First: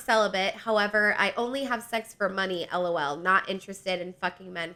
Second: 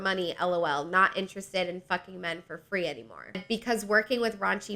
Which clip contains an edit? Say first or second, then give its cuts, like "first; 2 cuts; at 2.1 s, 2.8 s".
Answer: second; 1 cut; at 3.4 s